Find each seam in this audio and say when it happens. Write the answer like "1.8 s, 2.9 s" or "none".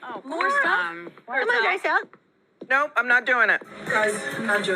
3.7 s